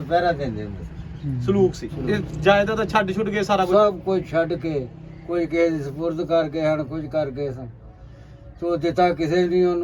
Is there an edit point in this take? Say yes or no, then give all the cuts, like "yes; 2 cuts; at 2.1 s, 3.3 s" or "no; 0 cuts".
yes; 1 cut; at 1.9 s